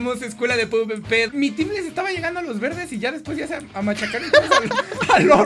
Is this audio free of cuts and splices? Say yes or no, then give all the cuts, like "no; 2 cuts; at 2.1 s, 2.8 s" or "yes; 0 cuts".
no; 1 cut; at 1.3 s